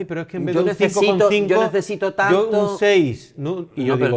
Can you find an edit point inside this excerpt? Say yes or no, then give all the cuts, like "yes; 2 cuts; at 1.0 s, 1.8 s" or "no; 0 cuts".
no; 0 cuts